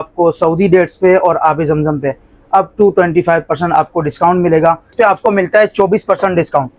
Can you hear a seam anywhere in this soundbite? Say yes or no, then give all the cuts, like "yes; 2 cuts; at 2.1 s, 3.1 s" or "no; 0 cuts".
yes; 1 cut; at 4.9 s